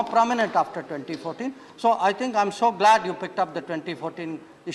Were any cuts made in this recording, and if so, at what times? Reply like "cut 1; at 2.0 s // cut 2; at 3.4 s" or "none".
none